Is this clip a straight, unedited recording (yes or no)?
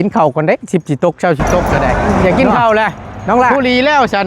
no